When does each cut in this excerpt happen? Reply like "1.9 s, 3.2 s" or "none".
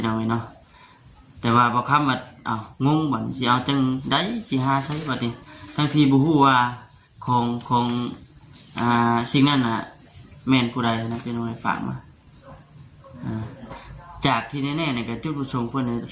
13.6 s